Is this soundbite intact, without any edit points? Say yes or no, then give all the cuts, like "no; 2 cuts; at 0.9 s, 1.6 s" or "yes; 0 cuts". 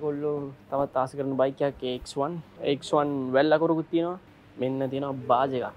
no; 2 cuts; at 2.5 s, 4.2 s